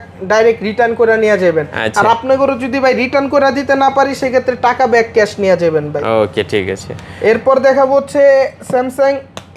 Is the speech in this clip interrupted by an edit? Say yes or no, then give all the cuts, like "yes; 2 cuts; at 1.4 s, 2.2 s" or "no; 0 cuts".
no; 0 cuts